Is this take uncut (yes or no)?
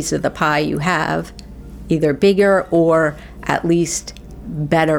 yes